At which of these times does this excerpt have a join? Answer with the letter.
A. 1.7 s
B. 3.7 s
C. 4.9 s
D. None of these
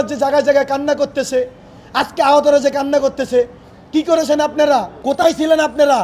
C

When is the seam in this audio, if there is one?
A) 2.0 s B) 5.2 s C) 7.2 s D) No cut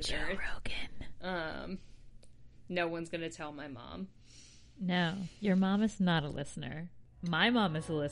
C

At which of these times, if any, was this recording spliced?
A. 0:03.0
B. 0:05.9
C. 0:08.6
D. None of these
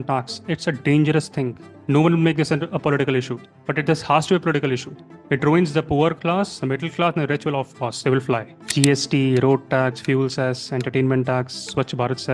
C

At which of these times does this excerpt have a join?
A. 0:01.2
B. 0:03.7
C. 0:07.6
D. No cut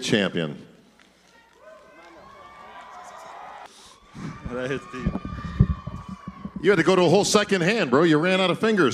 B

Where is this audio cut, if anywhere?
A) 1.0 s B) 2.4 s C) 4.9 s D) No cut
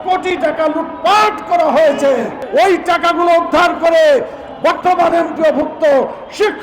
B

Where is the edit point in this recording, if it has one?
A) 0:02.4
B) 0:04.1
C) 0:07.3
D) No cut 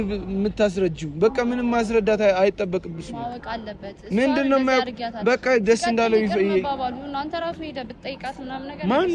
D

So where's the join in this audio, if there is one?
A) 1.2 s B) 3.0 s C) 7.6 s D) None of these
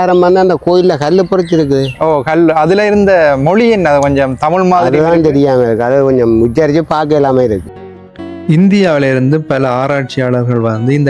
C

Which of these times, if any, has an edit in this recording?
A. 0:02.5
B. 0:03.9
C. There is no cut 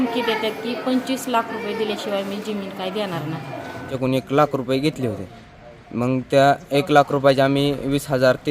B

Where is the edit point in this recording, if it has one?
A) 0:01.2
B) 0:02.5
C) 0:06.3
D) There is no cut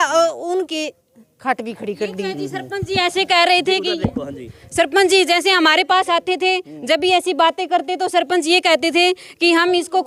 D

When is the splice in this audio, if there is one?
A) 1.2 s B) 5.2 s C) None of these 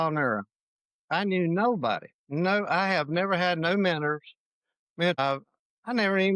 B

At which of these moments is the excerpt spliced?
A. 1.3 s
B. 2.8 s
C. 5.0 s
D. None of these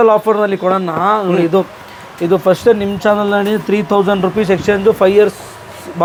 D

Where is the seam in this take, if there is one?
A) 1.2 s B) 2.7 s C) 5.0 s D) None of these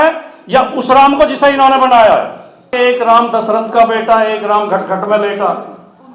B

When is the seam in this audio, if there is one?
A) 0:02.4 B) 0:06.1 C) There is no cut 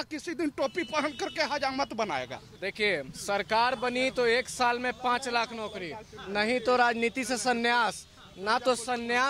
A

